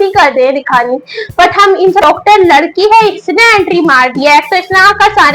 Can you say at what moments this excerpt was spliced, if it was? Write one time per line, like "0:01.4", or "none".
0:02.0